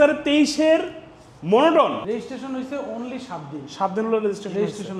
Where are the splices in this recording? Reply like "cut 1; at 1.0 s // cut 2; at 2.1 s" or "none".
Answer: cut 1; at 2.1 s